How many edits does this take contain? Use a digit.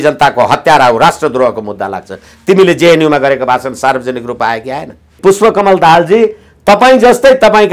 1